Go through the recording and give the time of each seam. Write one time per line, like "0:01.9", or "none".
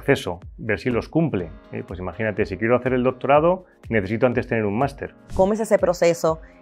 0:05.2